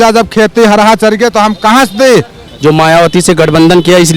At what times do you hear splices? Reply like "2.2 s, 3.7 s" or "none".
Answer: 2.4 s

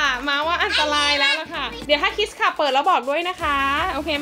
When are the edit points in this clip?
1.8 s

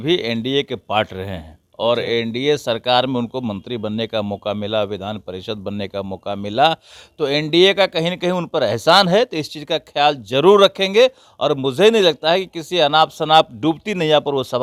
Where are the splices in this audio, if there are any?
none

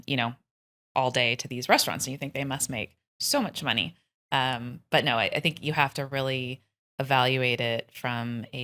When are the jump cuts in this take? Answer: none

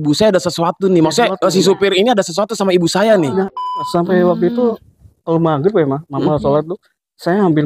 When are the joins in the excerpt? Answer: 3.9 s

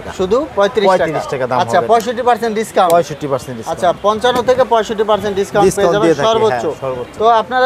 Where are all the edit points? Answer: none

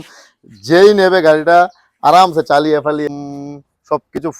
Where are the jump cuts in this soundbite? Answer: 3.1 s

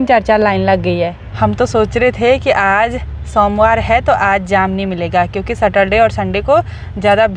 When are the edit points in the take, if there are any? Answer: none

